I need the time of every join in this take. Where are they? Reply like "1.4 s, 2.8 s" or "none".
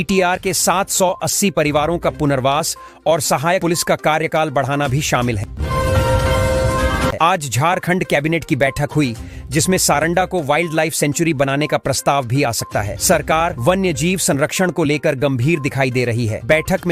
5.5 s, 7.1 s

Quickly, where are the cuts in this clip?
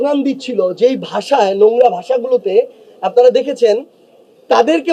none

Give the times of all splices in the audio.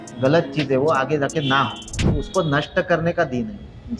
2.0 s

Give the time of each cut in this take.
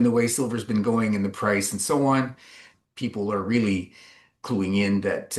2.7 s

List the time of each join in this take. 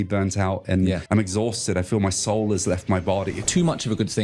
1.0 s, 3.4 s

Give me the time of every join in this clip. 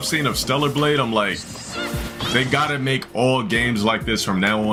none

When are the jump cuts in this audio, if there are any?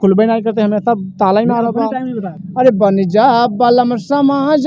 2.3 s

